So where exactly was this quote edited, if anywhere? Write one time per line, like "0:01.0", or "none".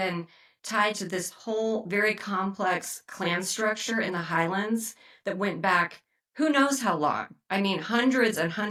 none